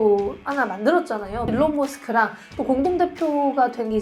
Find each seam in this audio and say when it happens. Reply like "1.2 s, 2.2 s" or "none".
1.5 s